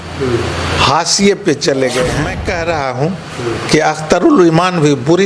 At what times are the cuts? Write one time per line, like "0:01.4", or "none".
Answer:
0:02.3